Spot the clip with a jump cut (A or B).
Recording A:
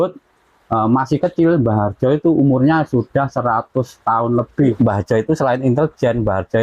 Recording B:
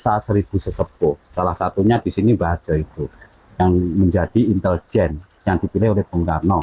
A